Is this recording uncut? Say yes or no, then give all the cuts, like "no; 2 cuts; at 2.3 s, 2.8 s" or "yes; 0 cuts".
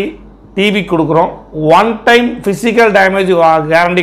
yes; 0 cuts